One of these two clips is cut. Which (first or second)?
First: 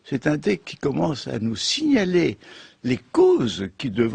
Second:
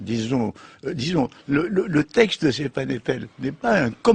first